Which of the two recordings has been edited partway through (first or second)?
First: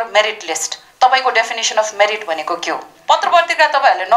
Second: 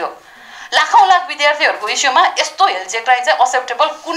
first